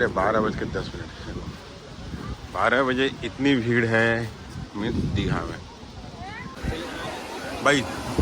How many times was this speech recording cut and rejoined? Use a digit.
1